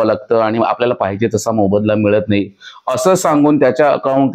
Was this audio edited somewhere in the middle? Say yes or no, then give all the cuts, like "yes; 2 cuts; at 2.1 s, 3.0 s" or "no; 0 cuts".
no; 0 cuts